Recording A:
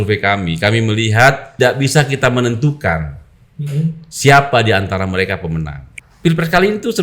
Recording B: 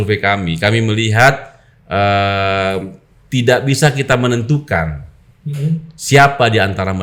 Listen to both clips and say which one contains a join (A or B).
A